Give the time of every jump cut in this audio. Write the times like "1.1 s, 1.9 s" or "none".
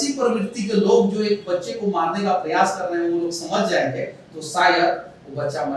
none